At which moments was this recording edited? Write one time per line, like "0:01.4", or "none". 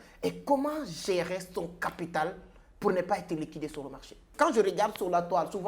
0:04.3